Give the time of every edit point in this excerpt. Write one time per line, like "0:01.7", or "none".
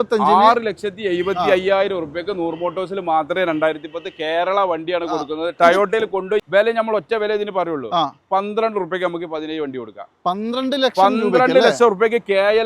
0:06.4